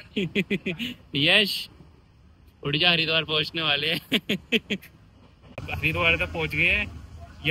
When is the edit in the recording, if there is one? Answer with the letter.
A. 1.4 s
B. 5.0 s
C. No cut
C